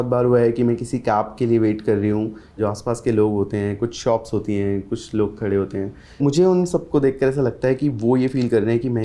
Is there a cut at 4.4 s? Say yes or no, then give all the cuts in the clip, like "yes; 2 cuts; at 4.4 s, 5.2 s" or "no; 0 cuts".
no; 2 cuts; at 2.6 s, 6.2 s